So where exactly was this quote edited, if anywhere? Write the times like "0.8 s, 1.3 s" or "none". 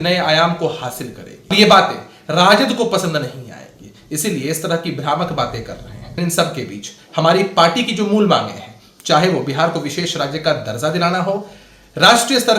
1.5 s, 6.2 s